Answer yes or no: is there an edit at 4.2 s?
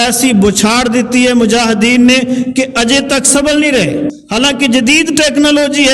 yes